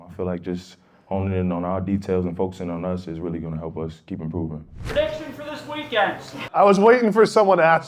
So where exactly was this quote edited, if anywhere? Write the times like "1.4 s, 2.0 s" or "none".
4.7 s, 6.4 s